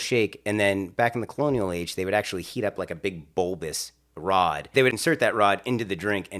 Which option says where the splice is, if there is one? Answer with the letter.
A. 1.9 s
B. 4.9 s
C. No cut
B